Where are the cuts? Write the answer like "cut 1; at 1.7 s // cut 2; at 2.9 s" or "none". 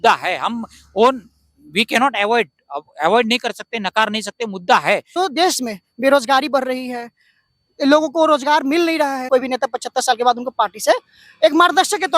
cut 1; at 5.1 s // cut 2; at 9.2 s

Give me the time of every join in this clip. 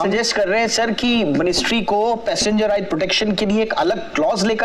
none

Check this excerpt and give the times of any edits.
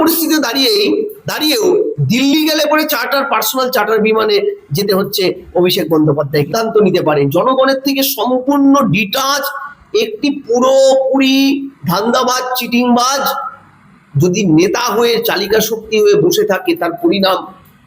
cut 1; at 6.5 s

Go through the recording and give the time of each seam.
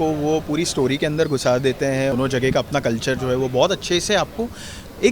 cut 1; at 2.1 s

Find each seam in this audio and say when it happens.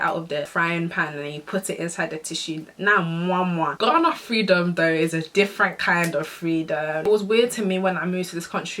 cut 1; at 3.7 s // cut 2; at 7.0 s

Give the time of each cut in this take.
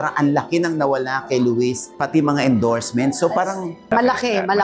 cut 1; at 1.8 s // cut 2; at 3.8 s

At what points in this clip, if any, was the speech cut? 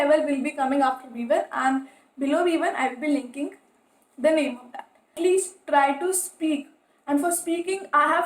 cut 1; at 5.2 s

